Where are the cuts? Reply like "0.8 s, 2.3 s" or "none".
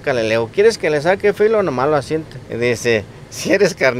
2.4 s